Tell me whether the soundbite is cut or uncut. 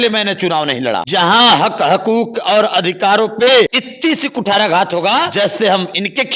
cut